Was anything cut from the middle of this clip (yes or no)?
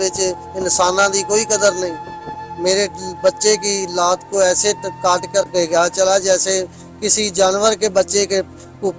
no